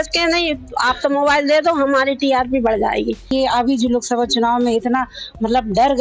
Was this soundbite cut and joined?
yes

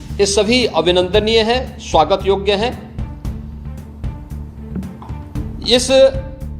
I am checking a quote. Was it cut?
yes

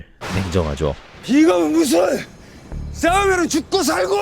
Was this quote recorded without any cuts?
yes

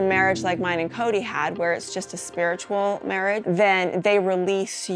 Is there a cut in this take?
yes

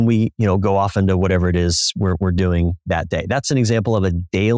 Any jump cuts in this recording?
yes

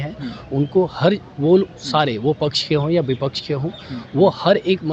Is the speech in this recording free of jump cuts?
yes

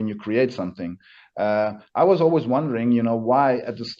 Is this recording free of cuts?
yes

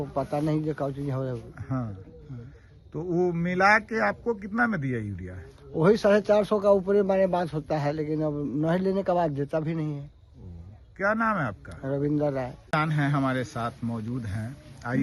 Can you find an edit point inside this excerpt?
no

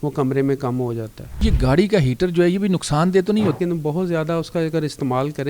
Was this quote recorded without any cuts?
no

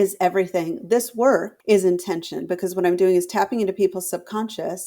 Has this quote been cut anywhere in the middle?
yes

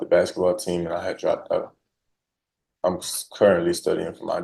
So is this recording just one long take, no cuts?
yes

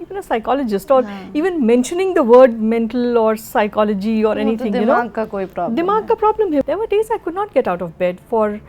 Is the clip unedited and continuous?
no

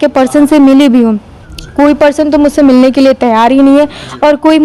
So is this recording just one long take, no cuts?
yes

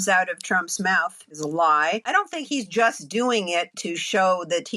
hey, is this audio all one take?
no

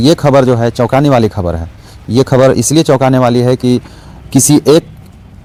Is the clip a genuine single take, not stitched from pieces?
yes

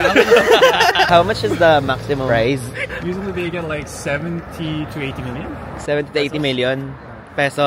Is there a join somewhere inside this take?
yes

